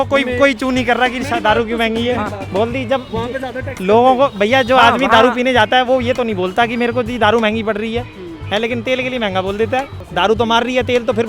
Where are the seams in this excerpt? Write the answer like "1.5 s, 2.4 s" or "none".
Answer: 2.4 s, 10.0 s